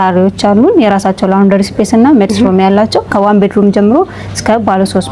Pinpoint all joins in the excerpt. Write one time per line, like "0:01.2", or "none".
0:03.1

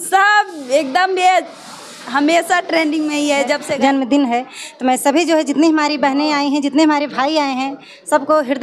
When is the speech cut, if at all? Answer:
0:03.7

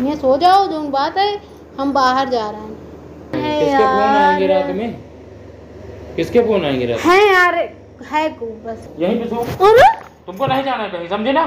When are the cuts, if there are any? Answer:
0:03.3
0:08.8

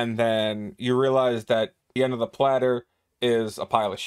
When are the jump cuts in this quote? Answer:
0:01.9

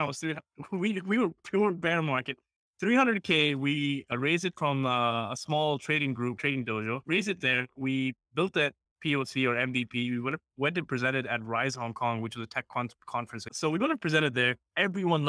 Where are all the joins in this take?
0:13.4

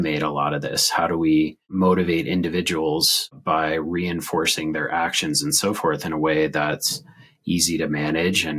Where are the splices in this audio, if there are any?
0:01.6

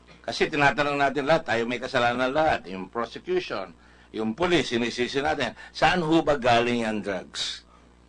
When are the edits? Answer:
0:01.1

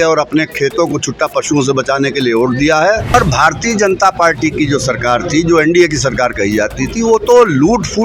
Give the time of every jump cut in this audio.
0:03.1

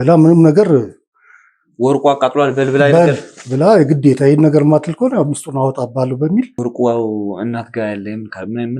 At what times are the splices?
0:06.6

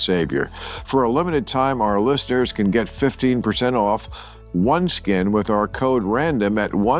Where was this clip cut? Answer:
none

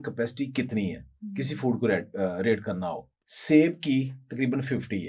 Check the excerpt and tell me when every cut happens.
none

